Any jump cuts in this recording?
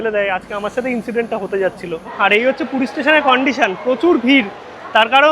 yes; 1 cut; at 2.1 s

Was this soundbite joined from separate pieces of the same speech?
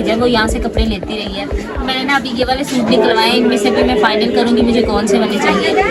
no; 0 cuts

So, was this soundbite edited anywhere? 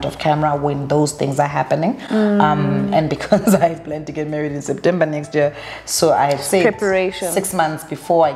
no; 0 cuts

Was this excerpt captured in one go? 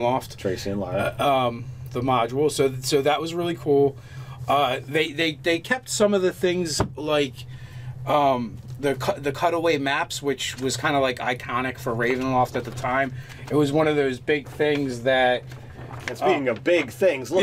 yes; 0 cuts

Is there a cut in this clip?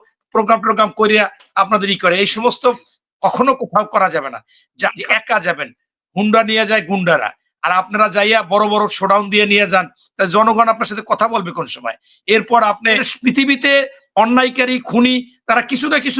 yes; 2 cuts; at 5.0 s, 13.1 s

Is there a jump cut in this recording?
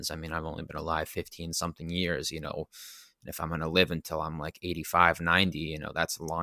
no; 0 cuts

